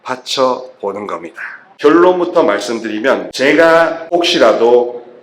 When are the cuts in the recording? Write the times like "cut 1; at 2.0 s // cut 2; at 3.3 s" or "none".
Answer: cut 1; at 1.7 s